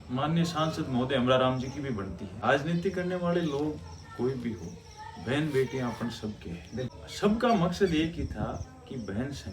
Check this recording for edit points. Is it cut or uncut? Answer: cut